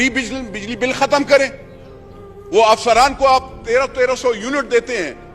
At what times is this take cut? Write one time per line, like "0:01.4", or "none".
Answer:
none